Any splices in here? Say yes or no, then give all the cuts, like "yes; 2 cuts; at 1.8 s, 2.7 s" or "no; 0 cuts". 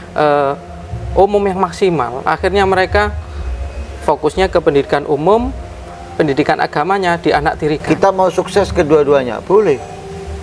yes; 1 cut; at 7.8 s